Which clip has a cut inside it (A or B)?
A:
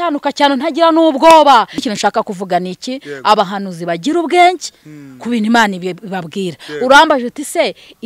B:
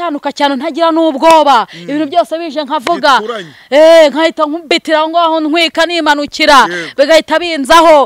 A